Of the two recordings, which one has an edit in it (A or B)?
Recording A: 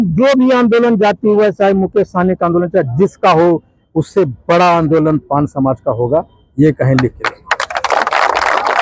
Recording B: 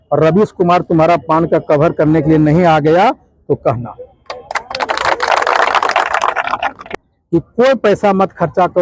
B